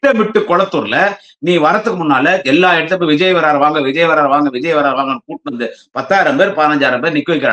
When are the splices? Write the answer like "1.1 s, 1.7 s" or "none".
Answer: none